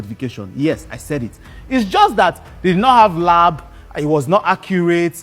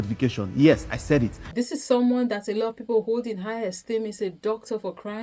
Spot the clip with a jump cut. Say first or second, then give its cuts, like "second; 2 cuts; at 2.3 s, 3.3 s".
second; 1 cut; at 1.4 s